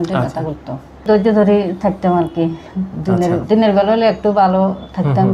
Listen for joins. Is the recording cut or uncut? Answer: cut